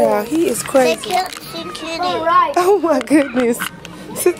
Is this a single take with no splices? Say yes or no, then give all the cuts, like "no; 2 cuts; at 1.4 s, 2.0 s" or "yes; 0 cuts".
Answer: yes; 0 cuts